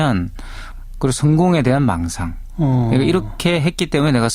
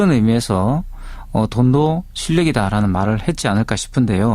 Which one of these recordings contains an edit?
second; 1 cut; at 1.1 s

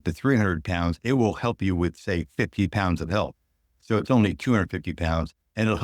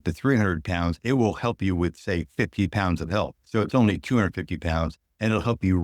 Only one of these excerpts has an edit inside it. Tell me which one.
second; 1 cut; at 3.4 s

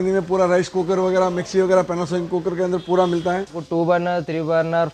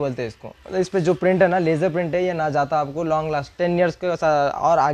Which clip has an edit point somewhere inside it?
first; 1 cut; at 3.6 s

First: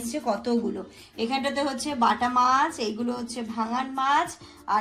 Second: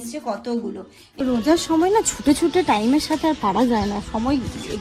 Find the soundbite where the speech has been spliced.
second; 1 cut; at 1.1 s

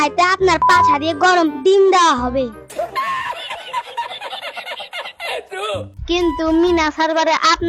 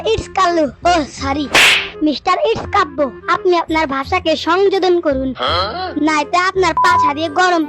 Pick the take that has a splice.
first; 1 cut; at 2.6 s

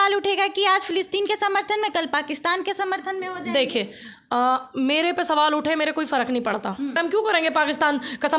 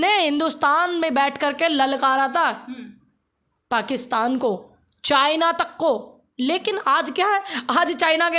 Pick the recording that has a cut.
first; 1 cut; at 7.0 s

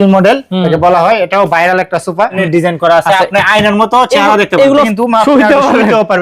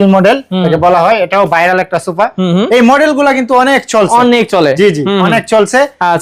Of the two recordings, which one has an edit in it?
first; 2 cuts; at 2.4 s, 4.9 s

